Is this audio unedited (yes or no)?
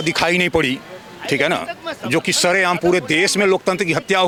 yes